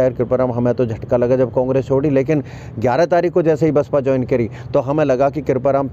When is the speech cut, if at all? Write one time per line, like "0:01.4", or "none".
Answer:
none